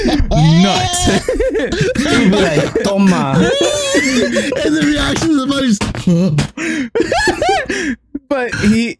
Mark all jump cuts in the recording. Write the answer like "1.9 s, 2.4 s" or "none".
none